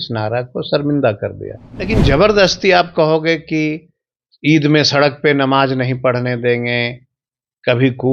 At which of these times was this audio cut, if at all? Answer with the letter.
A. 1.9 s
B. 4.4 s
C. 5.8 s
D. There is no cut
A